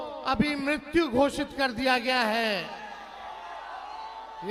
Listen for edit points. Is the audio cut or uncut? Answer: uncut